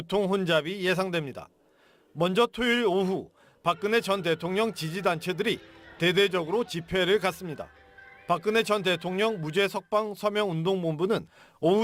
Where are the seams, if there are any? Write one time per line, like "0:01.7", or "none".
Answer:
none